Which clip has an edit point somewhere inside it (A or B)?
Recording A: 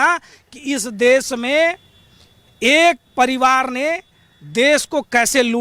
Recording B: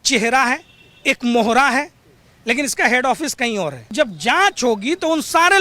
B